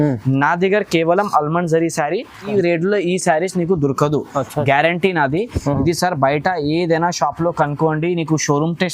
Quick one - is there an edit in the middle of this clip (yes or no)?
yes